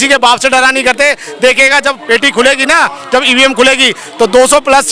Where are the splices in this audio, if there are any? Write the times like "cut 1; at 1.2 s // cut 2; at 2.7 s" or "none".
none